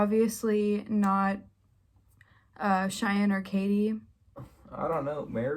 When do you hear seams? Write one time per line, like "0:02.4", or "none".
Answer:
0:04.4